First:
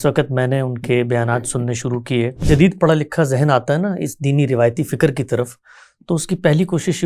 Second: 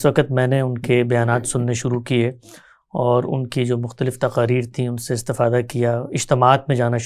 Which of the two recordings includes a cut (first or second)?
first